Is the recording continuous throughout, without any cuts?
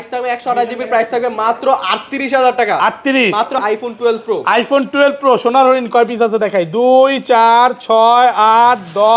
no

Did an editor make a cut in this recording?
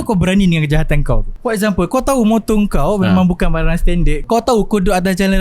yes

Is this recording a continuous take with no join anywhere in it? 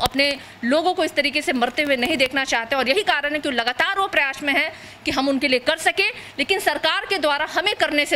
yes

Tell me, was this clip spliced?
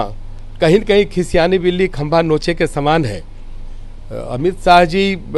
no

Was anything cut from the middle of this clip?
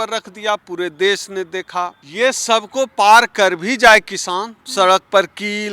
yes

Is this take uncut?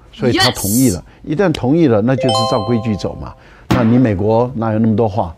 no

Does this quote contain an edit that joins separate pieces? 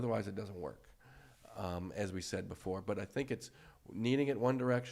no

